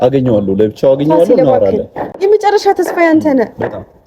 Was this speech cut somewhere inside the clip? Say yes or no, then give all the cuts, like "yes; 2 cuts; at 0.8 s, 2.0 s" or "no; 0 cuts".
yes; 1 cut; at 2.1 s